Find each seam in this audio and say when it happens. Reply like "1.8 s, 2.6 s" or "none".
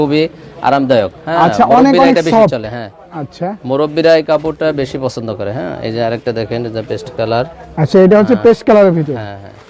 none